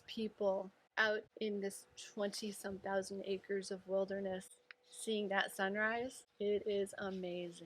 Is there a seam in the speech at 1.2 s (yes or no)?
yes